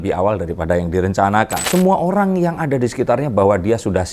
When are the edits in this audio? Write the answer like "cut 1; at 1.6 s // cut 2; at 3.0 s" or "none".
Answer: cut 1; at 1.6 s